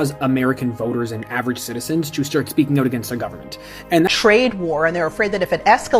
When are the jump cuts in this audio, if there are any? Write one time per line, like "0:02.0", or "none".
0:04.1